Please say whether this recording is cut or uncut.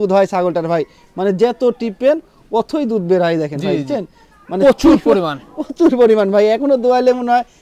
uncut